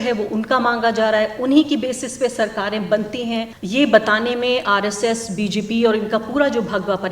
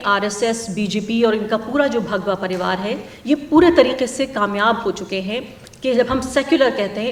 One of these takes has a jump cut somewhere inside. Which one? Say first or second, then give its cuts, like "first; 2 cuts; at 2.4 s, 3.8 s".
first; 1 cut; at 3.6 s